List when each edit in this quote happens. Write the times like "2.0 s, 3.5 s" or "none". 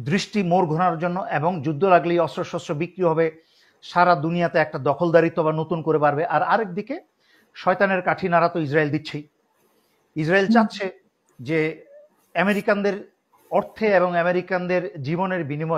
none